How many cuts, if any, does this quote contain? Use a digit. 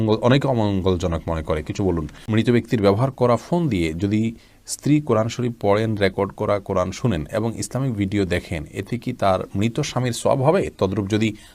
1